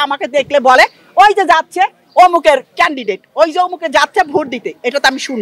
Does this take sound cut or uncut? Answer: uncut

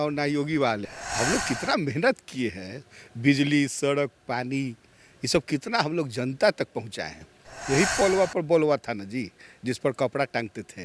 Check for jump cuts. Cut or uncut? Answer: cut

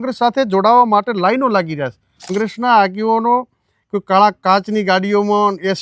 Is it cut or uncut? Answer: cut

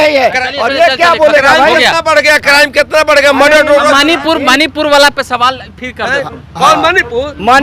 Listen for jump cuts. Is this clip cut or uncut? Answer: uncut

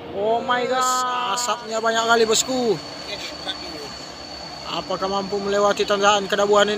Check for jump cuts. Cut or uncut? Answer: cut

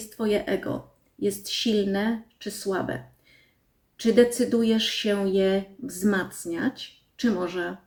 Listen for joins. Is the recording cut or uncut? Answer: uncut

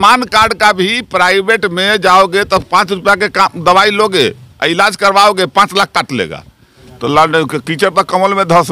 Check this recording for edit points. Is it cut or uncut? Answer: cut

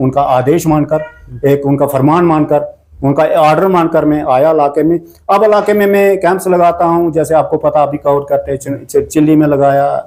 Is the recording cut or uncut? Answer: uncut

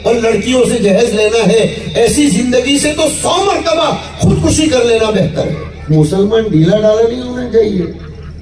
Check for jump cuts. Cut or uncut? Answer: cut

